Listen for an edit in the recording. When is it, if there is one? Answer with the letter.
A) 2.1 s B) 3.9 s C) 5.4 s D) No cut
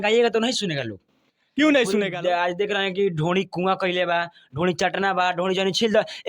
A